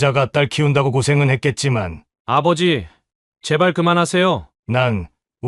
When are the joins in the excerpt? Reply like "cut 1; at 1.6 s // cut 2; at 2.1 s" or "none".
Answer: cut 1; at 4.5 s